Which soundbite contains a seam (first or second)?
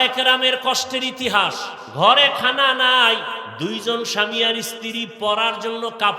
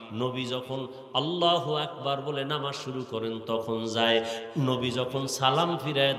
first